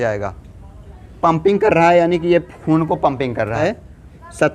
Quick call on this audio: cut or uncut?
cut